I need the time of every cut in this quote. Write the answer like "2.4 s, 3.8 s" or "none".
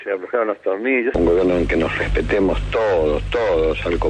1.1 s